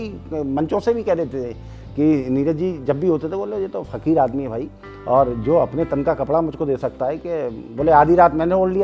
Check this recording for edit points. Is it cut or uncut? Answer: uncut